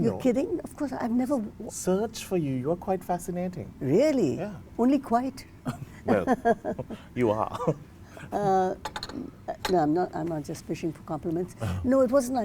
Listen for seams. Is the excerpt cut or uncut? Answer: uncut